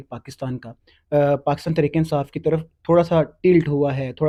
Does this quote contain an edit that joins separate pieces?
no; 0 cuts

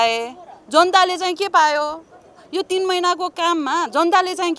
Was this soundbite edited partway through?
no; 0 cuts

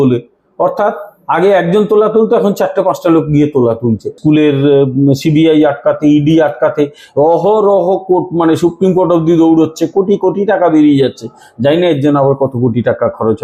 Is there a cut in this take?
yes; 1 cut; at 4.1 s

